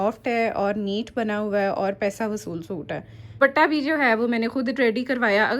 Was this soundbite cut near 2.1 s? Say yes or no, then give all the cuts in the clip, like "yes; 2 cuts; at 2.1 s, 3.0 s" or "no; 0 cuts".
no; 1 cut; at 3.4 s